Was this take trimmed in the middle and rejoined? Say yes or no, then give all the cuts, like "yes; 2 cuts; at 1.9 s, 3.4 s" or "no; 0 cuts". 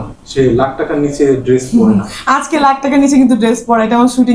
no; 0 cuts